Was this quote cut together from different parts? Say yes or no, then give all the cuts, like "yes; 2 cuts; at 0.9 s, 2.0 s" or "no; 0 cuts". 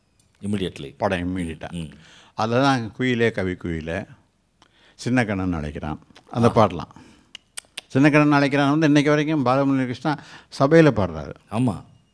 no; 0 cuts